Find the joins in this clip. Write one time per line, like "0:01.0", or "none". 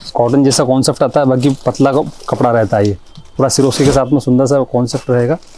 none